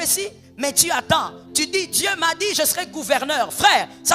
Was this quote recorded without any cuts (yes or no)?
no